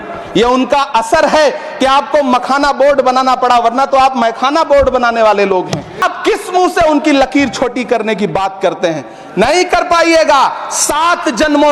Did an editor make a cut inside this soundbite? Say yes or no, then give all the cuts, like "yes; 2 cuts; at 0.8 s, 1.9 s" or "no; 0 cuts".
yes; 1 cut; at 6.0 s